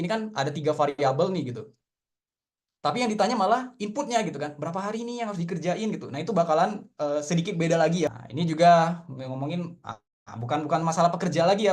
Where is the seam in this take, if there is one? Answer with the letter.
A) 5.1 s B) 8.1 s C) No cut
B